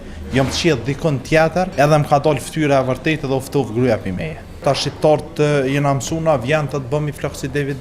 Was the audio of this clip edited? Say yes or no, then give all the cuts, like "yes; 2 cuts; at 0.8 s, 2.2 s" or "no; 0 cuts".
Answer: yes; 2 cuts; at 1.7 s, 4.6 s